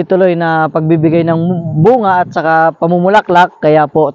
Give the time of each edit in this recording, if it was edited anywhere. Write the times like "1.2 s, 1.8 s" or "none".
none